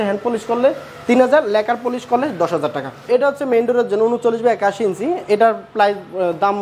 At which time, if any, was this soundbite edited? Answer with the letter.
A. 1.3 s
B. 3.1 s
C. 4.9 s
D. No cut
B